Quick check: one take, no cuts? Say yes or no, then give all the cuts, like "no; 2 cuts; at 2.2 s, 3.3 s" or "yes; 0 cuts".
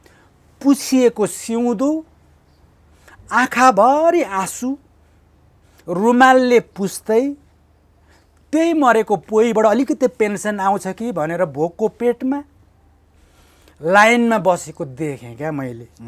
yes; 0 cuts